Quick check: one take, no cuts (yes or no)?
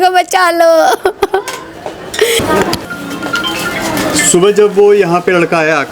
no